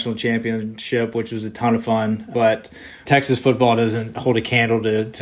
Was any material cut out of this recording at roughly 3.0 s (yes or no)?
yes